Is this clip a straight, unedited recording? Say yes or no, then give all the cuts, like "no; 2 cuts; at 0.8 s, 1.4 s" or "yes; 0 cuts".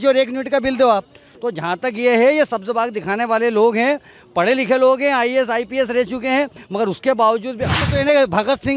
no; 1 cut; at 7.8 s